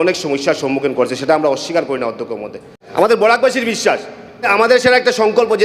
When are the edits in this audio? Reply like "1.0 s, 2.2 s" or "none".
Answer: 2.8 s, 4.5 s